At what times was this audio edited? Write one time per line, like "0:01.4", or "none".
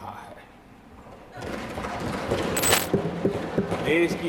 0:02.8